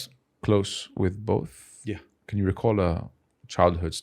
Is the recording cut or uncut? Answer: cut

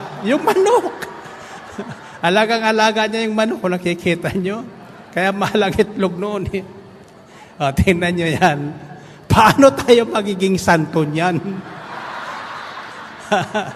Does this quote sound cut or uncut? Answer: uncut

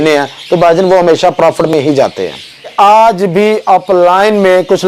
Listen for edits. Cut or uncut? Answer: cut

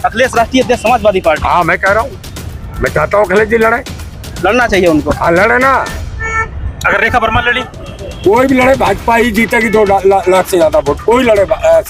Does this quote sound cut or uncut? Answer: uncut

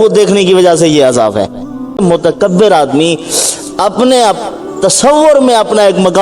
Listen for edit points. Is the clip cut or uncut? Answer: cut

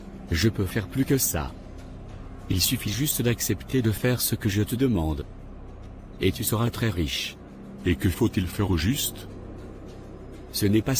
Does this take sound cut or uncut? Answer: uncut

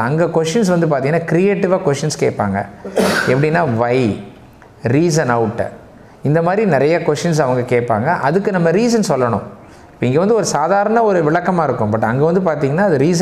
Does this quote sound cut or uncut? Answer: uncut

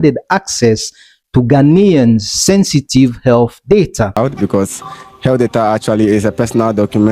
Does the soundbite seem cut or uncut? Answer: cut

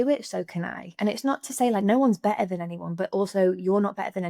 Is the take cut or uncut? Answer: uncut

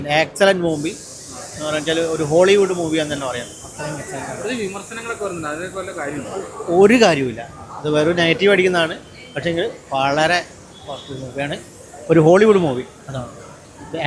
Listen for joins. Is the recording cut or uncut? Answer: uncut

